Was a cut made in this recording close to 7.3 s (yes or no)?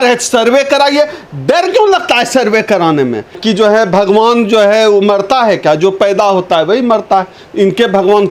no